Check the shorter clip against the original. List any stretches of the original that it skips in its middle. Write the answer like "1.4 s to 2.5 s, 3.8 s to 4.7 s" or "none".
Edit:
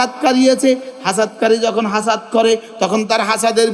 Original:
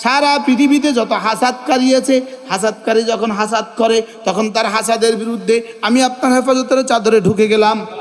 none